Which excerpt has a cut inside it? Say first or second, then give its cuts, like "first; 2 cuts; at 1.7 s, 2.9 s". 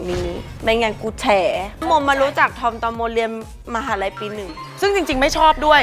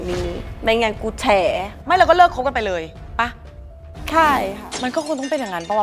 first; 1 cut; at 1.7 s